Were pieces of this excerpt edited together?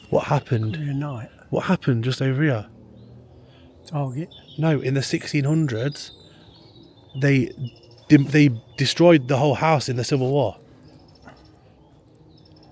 no; 0 cuts

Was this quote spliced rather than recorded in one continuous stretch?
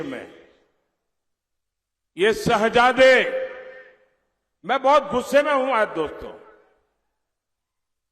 no; 0 cuts

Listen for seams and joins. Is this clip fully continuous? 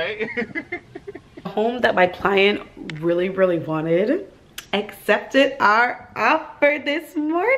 no; 1 cut; at 1.4 s

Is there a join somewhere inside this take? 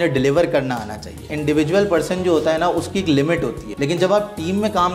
yes; 2 cuts; at 1.3 s, 3.6 s

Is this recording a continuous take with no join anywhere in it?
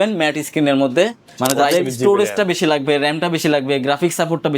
no; 1 cut; at 1.3 s

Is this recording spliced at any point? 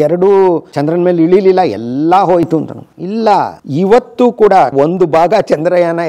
yes; 2 cuts; at 3.6 s, 4.7 s

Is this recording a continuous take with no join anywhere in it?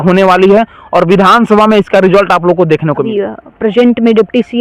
no; 1 cut; at 3.1 s

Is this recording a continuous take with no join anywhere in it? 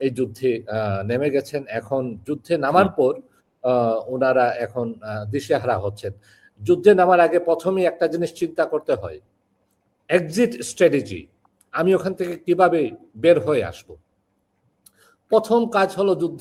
yes; 0 cuts

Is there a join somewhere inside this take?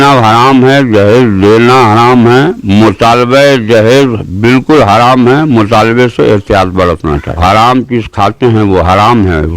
yes; 1 cut; at 7.4 s

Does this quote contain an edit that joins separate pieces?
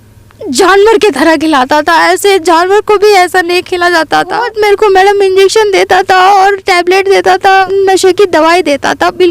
yes; 2 cuts; at 4.5 s, 7.7 s

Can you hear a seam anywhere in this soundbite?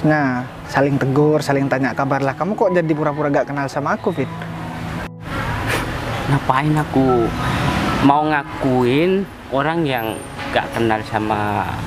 no; 0 cuts

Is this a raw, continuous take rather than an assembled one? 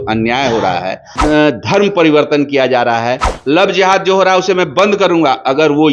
no; 2 cuts; at 1.1 s, 3.3 s

